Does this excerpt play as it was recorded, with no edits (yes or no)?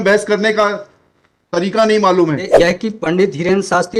no